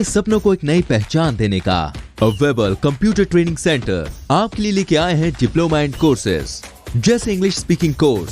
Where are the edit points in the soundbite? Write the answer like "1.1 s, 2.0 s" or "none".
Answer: none